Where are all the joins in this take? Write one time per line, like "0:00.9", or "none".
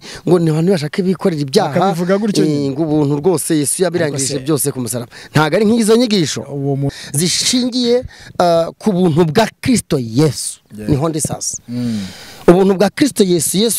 0:06.9